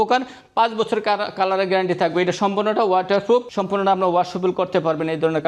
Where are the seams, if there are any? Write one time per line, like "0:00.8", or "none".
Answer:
0:03.5